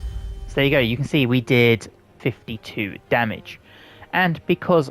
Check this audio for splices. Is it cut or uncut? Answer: cut